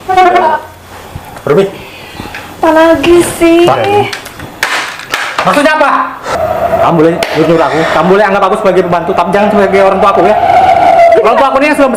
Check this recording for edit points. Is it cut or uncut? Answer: cut